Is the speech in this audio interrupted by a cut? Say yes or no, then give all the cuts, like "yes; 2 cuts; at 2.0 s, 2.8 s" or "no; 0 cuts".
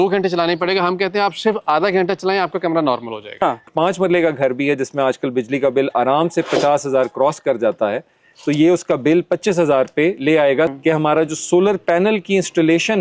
yes; 2 cuts; at 3.6 s, 10.7 s